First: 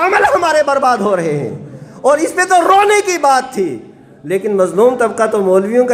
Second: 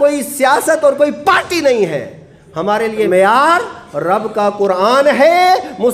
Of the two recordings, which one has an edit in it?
second; 1 cut; at 3.1 s

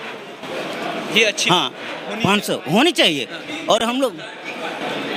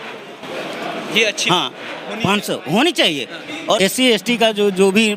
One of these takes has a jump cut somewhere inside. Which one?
second; 1 cut; at 3.8 s

